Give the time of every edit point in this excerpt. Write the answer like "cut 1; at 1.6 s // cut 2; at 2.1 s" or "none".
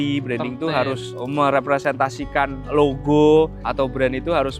cut 1; at 1.1 s // cut 2; at 2.6 s // cut 3; at 3.6 s